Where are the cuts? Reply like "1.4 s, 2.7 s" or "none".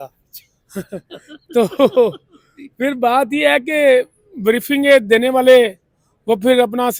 none

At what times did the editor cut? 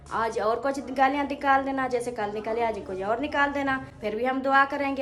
none

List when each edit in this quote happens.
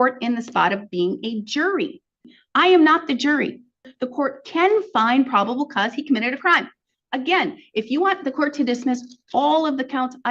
2.3 s, 3.9 s

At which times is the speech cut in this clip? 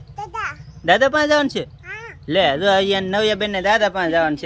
none

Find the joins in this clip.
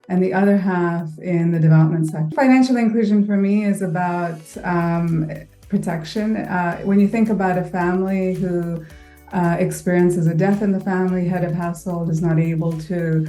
2.3 s

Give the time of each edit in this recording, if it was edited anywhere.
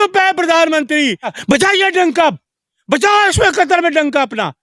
1.3 s

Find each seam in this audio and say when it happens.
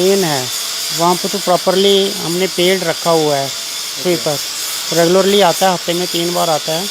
none

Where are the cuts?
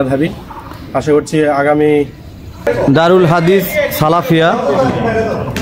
2.6 s

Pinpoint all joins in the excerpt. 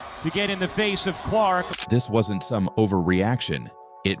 1.7 s

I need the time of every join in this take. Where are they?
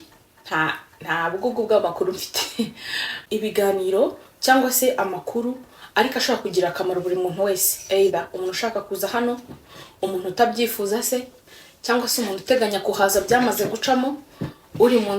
3.2 s

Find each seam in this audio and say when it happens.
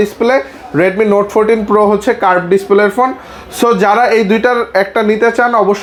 none

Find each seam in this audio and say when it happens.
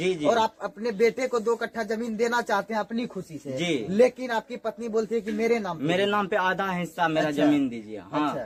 none

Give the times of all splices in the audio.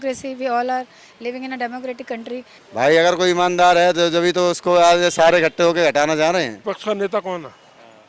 2.6 s, 6.6 s

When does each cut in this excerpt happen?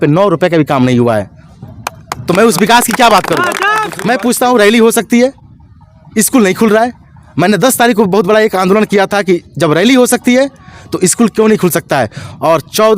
3.9 s

